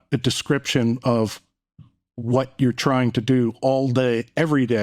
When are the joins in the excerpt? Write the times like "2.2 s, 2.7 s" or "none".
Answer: none